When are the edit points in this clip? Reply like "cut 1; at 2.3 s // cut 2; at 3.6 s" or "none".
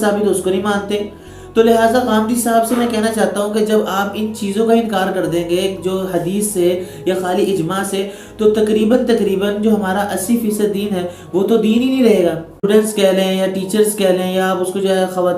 cut 1; at 12.7 s